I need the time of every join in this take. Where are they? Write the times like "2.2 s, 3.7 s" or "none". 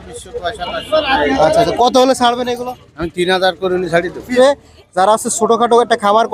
4.3 s